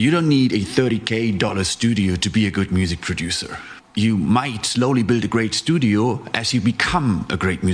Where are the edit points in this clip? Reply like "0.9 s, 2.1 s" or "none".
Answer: 3.7 s